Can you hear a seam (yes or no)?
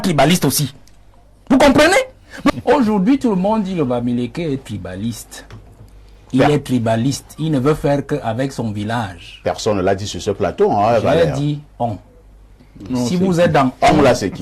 yes